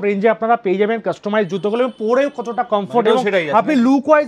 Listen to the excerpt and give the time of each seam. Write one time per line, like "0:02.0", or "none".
none